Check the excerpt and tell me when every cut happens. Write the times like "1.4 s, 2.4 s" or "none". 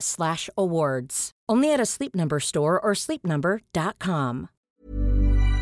4.5 s